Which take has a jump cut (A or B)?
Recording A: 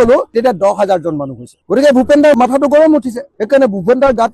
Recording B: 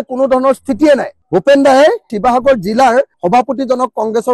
B